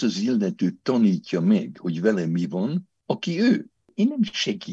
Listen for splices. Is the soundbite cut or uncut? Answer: cut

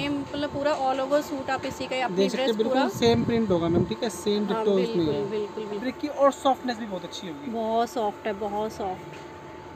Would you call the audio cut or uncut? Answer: cut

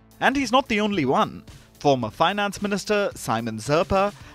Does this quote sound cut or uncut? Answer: uncut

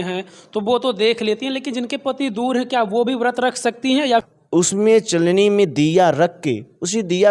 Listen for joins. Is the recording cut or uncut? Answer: cut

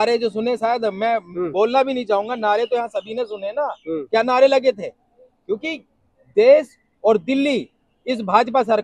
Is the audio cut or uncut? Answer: uncut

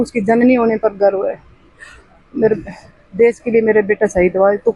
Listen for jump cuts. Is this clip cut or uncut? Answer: uncut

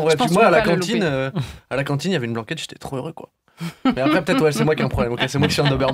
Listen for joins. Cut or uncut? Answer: uncut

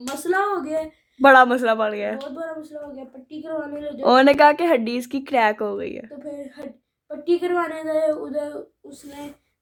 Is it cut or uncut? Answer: uncut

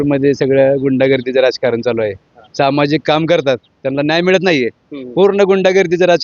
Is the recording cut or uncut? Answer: uncut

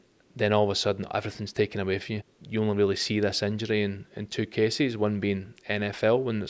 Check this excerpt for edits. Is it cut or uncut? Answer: cut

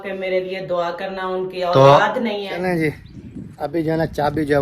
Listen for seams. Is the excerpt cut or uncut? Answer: cut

